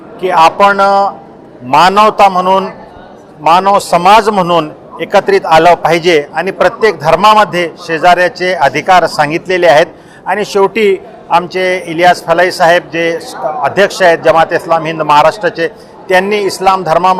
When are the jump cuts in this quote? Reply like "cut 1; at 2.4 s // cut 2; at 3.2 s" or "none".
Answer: none